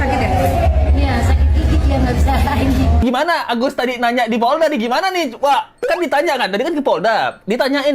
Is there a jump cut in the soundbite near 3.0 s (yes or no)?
yes